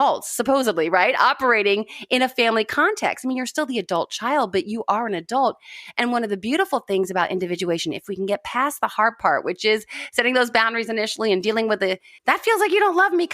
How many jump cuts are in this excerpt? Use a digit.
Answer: 1